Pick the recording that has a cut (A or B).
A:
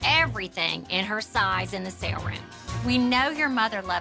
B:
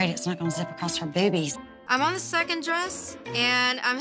B